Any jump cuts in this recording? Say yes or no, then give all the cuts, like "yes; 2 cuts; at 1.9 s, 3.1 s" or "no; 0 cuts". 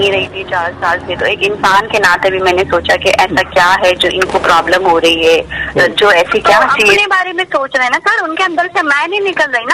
yes; 1 cut; at 7.0 s